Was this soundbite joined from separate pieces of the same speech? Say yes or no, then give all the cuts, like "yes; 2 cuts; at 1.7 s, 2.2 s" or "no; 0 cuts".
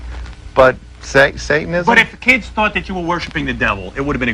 yes; 1 cut; at 1.3 s